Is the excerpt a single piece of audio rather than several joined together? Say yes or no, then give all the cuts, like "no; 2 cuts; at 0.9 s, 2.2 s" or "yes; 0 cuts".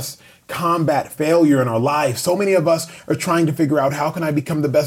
no; 1 cut; at 1.1 s